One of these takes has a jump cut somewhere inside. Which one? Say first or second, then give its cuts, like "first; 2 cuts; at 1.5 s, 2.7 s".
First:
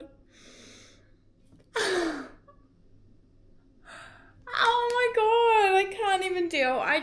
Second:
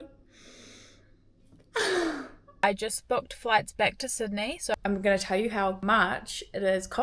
second; 3 cuts; at 2.5 s, 4.7 s, 5.8 s